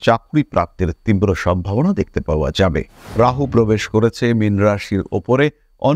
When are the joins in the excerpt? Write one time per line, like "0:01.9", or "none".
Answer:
0:03.0